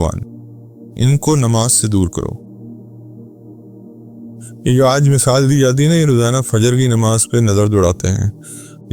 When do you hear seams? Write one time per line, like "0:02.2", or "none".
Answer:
0:02.4
0:04.3

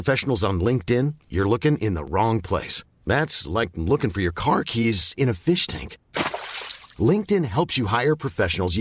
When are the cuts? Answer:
none

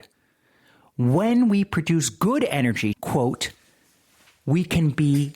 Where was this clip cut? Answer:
0:03.0

